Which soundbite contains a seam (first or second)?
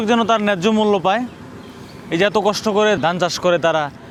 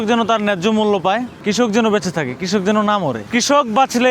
second